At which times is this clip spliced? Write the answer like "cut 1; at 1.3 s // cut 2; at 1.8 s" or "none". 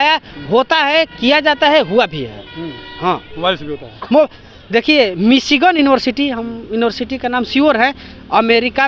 none

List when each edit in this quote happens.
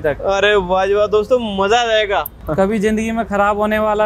cut 1; at 2.4 s

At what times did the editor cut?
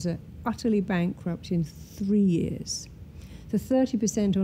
none

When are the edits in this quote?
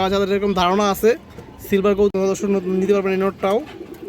cut 1; at 2.1 s

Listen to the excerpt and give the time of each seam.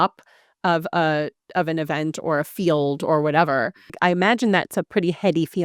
cut 1; at 4.0 s

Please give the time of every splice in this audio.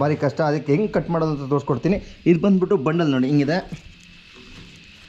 none

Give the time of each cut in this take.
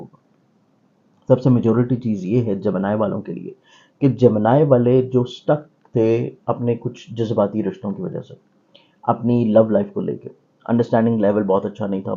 none

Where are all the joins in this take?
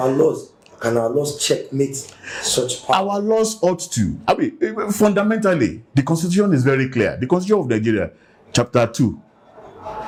none

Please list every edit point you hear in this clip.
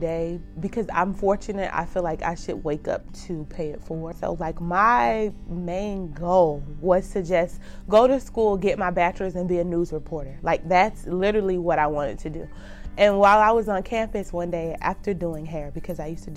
cut 1; at 4.1 s

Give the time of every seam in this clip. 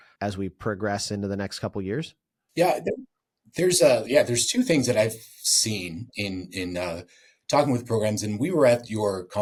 none

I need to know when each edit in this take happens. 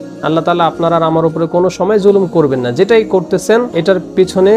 none

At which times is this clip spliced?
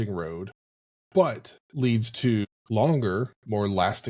cut 1; at 2.5 s

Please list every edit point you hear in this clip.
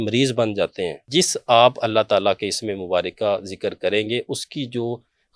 cut 1; at 1.1 s

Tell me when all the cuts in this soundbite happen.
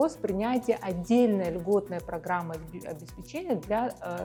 none

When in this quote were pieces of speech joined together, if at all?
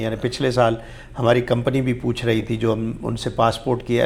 none

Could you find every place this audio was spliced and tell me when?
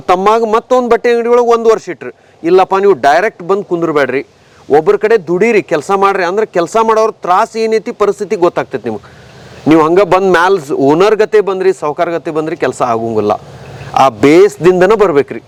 none

